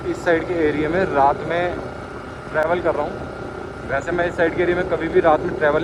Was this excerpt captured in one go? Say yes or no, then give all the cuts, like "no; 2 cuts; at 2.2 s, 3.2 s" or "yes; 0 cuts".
yes; 0 cuts